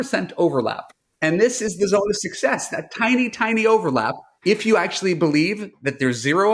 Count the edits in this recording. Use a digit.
0